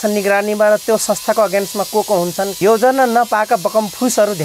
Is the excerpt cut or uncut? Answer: cut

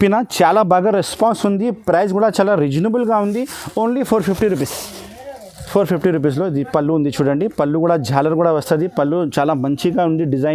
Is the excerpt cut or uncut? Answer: uncut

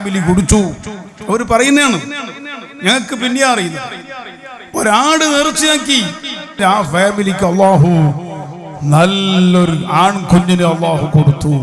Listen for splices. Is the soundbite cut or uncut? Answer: cut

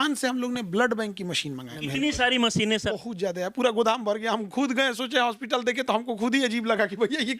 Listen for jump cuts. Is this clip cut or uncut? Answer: cut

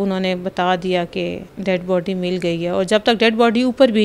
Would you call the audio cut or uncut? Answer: cut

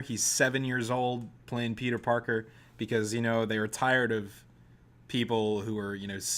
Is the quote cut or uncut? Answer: cut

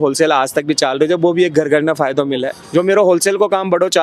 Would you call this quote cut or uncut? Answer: cut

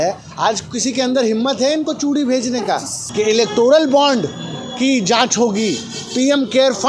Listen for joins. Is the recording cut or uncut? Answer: cut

